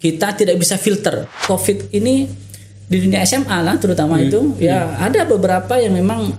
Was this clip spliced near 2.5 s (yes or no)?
no